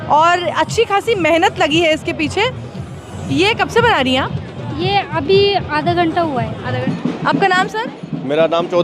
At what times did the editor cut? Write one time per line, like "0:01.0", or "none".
0:06.8